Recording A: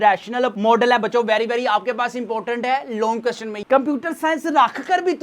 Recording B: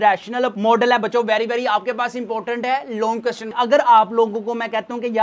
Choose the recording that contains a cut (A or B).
B